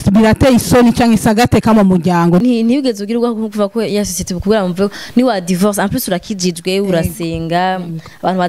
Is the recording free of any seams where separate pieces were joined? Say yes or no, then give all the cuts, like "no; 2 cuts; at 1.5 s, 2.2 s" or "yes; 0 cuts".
no; 1 cut; at 2.4 s